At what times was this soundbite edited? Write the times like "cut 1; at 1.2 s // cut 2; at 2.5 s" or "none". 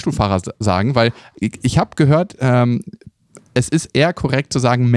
none